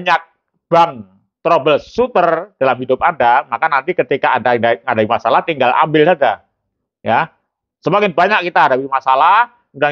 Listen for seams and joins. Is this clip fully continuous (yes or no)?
yes